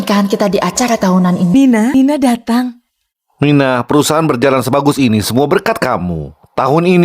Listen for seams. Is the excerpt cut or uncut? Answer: cut